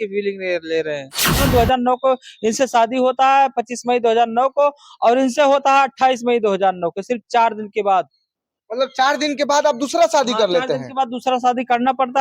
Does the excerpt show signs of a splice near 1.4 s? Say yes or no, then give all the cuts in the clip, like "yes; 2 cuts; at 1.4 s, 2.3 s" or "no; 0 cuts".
yes; 1 cut; at 1.4 s